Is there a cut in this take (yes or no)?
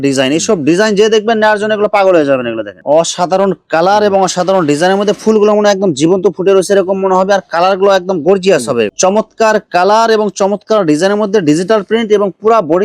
yes